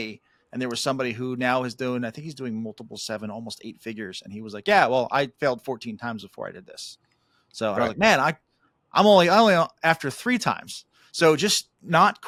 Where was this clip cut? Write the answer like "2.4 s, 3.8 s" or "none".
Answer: none